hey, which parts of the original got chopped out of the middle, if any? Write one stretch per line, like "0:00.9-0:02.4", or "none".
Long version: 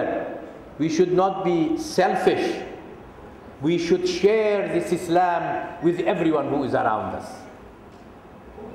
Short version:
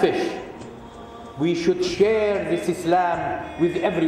none